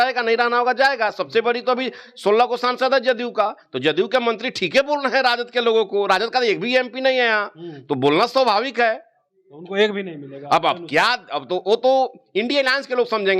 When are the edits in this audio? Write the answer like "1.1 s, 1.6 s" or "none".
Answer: none